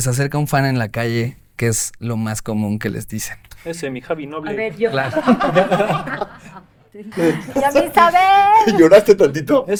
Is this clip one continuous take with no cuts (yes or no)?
yes